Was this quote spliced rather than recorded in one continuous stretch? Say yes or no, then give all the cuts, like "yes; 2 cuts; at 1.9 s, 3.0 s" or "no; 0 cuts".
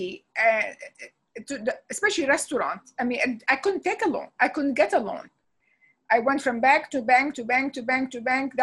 no; 0 cuts